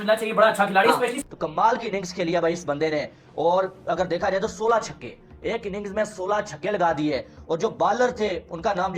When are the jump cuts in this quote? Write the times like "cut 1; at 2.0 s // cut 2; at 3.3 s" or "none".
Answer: cut 1; at 1.2 s